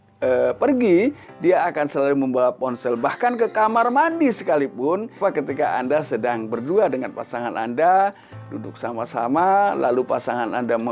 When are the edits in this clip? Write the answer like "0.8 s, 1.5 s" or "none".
5.2 s